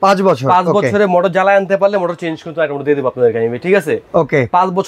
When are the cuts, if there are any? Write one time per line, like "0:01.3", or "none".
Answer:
none